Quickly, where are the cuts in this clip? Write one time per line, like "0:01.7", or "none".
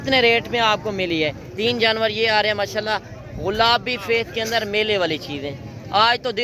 0:01.4